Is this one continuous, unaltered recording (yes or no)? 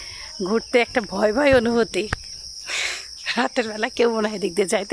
yes